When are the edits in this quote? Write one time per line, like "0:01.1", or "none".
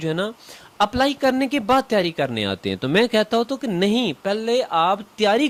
none